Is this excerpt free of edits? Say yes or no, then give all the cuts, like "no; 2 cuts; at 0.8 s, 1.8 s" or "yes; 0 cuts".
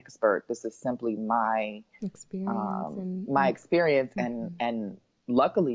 yes; 0 cuts